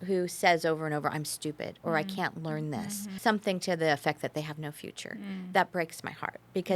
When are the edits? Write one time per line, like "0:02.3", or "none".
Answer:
0:03.1